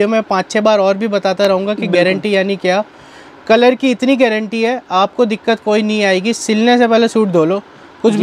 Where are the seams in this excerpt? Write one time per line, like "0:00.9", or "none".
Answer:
none